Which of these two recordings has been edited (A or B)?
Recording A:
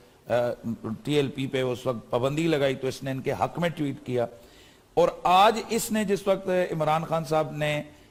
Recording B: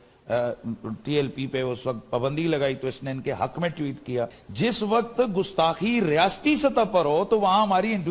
B